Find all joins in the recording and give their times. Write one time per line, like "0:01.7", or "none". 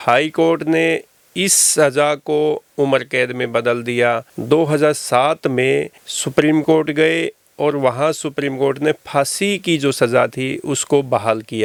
none